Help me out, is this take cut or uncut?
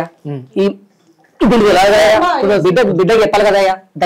cut